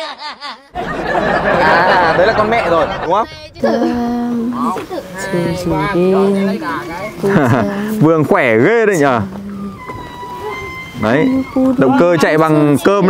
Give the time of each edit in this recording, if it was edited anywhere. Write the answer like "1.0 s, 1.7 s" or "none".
3.5 s